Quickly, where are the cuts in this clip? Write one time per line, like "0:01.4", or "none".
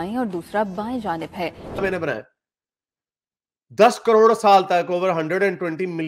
0:01.8